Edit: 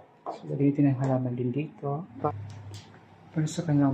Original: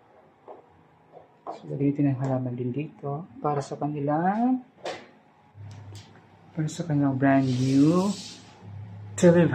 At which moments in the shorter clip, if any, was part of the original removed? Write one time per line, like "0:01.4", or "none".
0:02.3